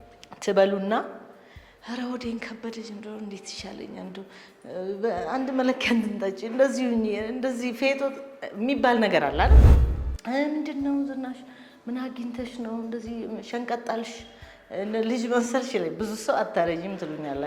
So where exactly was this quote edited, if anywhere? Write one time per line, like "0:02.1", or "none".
0:09.8